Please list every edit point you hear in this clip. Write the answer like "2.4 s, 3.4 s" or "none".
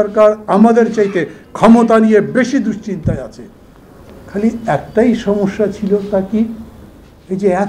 none